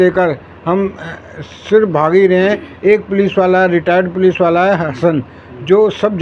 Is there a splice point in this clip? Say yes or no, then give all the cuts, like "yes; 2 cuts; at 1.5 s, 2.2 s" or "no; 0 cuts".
no; 0 cuts